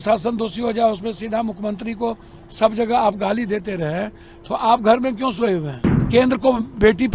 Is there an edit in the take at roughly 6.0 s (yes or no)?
yes